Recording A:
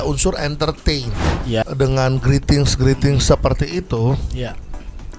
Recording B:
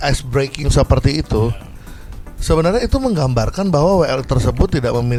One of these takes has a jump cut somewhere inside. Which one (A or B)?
A